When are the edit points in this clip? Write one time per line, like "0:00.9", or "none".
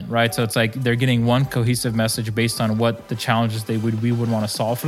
none

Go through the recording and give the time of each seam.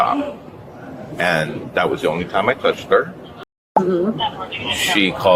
0:03.6

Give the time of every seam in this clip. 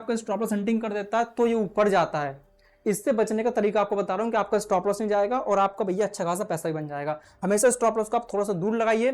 none

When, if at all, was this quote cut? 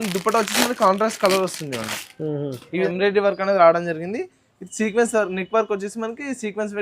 0:02.8

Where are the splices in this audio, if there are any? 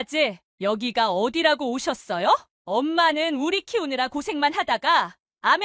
0:02.5

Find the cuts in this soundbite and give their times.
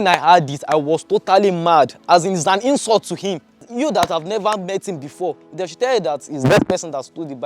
0:03.7

